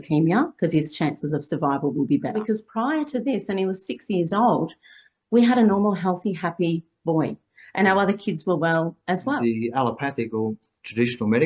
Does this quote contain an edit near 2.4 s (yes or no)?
yes